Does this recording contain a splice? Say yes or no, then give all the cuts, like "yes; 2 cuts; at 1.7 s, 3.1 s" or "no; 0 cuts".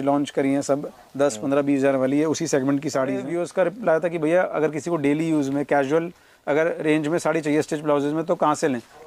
yes; 1 cut; at 3.3 s